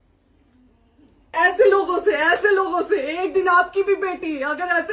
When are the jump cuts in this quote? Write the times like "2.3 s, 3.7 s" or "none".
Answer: 1.3 s